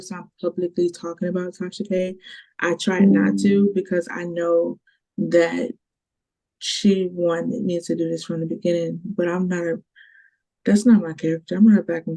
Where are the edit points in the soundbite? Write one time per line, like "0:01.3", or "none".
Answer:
none